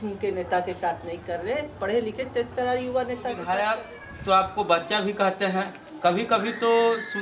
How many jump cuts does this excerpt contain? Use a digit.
1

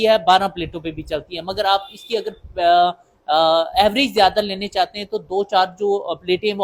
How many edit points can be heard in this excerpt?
0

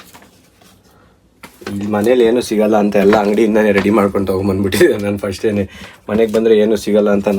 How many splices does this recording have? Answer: 0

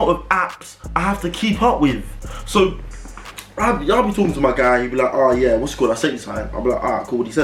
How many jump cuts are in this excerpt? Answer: 0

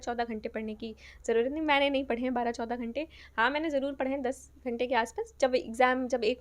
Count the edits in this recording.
0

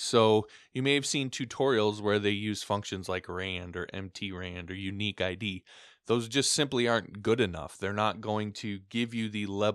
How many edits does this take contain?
0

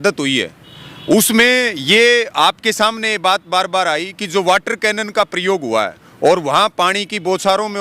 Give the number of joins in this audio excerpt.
1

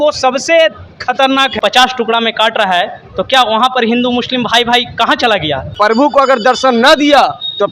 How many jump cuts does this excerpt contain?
2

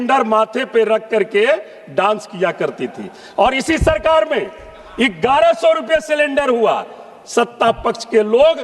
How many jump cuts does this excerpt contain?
0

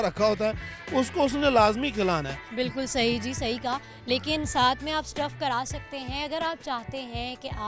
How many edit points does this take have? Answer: 0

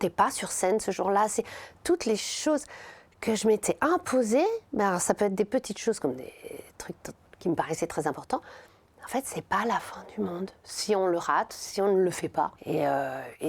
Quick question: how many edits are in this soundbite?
1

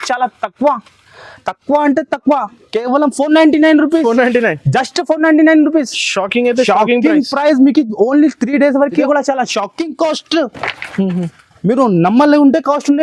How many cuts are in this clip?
1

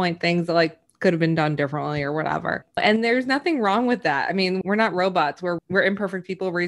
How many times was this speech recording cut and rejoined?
3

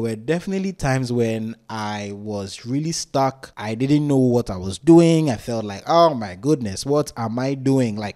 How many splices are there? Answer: 0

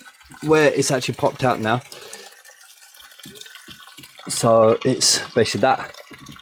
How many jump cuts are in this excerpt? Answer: 0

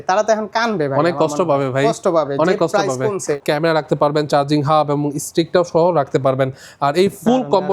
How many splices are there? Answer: 1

